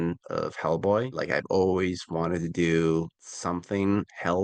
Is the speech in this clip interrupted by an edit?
no; 0 cuts

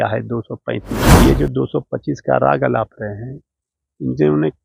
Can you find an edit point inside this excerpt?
yes; 1 cut; at 1.1 s

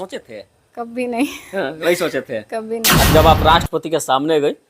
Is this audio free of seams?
no; 1 cut; at 3.1 s

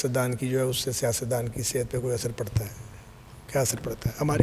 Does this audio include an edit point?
no; 0 cuts

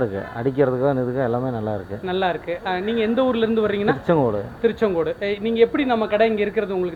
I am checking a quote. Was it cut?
no; 0 cuts

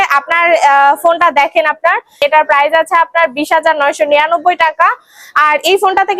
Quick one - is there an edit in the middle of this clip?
yes; 1 cut; at 2.2 s

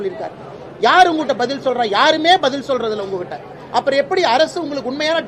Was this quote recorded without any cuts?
yes; 0 cuts

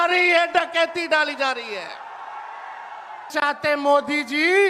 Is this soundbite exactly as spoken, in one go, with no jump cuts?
no; 1 cut; at 3.3 s

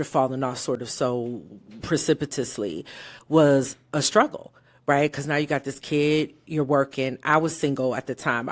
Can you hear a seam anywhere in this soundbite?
no; 0 cuts

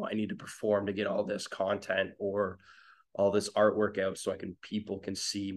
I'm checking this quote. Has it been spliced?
no; 0 cuts

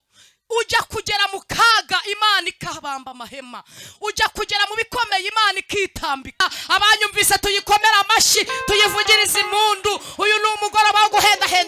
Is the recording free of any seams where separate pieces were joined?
no; 1 cut; at 6.4 s

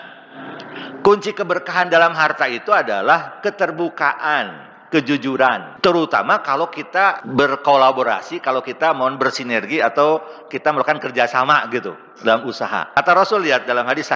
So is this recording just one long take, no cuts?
no; 3 cuts; at 5.7 s, 7.2 s, 13.0 s

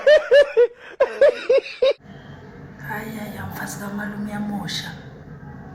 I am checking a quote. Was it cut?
yes; 1 cut; at 2.1 s

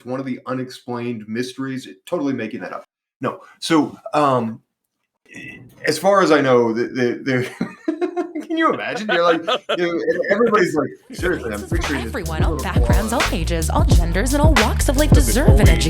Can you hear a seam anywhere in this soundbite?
yes; 1 cut; at 12.1 s

